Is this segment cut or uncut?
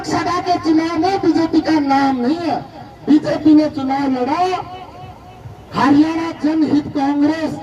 cut